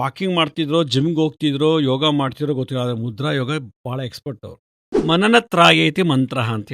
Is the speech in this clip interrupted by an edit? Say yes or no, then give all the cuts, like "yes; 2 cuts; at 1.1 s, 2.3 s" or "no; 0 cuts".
yes; 1 cut; at 5.0 s